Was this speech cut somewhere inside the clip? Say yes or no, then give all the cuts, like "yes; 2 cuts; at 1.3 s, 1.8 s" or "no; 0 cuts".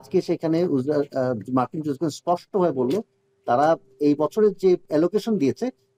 yes; 1 cut; at 4.8 s